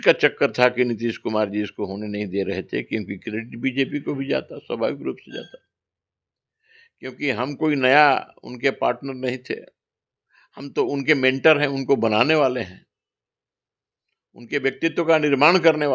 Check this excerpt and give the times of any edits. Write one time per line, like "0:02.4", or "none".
none